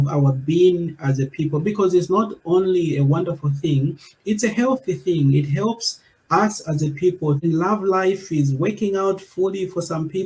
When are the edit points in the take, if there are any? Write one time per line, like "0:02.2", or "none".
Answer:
0:07.4